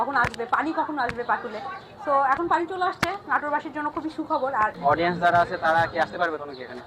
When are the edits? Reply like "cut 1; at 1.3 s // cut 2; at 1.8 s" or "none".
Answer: cut 1; at 4.8 s